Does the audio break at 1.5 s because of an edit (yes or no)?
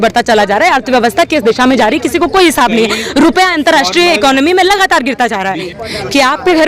no